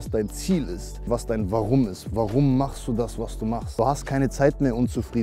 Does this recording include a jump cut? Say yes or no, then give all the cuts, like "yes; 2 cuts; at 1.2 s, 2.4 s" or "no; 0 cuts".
yes; 2 cuts; at 1.1 s, 3.7 s